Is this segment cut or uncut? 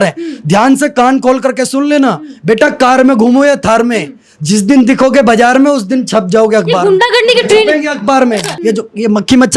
cut